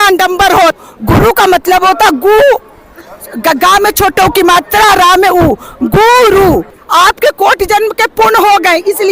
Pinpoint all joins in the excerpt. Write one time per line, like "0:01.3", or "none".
0:00.7
0:06.8